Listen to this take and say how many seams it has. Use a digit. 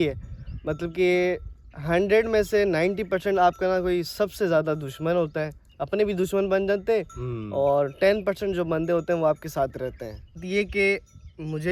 1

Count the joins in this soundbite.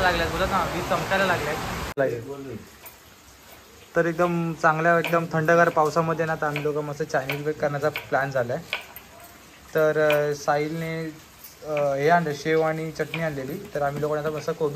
1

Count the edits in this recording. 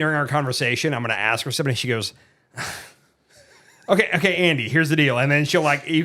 0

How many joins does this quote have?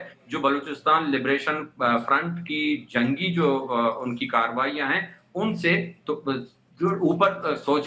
0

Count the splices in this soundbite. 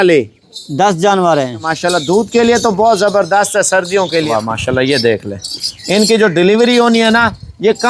2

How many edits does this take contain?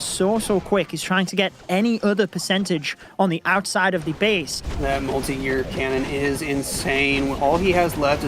1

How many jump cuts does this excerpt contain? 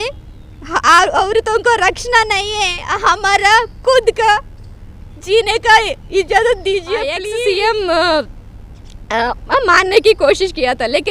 1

